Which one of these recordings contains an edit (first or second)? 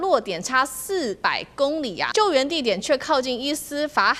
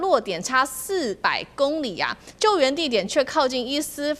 first